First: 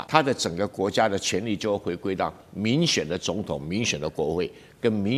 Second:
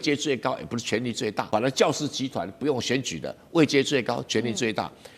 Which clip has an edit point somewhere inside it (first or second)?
second